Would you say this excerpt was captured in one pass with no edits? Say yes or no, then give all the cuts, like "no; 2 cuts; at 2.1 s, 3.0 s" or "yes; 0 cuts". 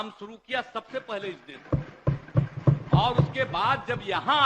yes; 0 cuts